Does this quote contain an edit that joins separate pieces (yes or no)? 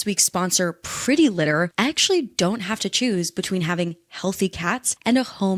no